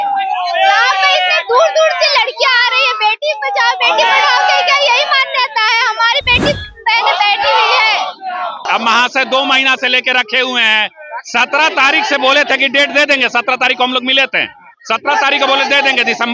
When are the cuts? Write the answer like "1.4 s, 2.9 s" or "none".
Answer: 8.7 s